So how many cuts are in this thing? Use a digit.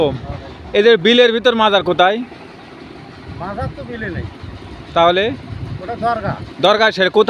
0